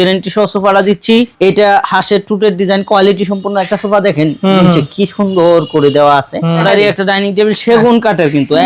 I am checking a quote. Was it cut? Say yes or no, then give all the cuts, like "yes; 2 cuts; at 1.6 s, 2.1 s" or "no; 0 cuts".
yes; 2 cuts; at 1.3 s, 6.6 s